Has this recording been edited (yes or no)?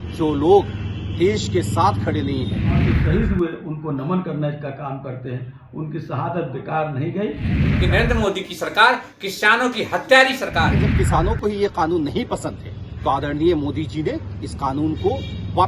yes